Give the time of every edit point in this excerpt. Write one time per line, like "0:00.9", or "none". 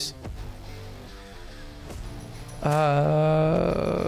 none